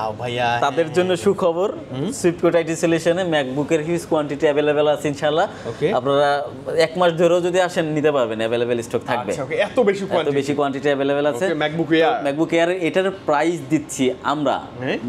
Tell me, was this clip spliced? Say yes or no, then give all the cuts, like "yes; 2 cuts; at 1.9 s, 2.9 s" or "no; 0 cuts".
no; 0 cuts